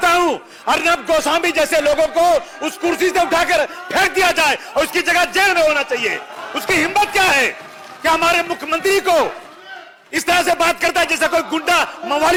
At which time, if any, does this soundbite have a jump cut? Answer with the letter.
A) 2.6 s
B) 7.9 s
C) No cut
C